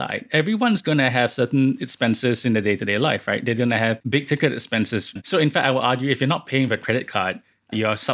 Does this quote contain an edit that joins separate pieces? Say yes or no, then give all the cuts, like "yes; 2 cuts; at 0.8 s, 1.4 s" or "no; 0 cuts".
yes; 2 cuts; at 4.0 s, 5.2 s